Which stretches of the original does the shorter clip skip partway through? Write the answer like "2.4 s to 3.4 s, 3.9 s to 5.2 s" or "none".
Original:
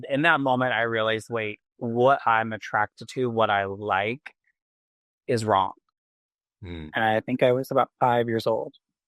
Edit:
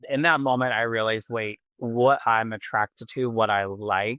none